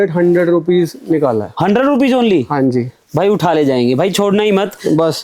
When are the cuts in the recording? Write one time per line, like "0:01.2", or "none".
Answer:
none